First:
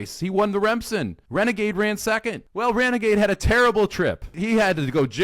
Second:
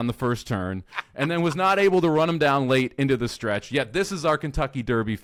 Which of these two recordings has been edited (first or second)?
first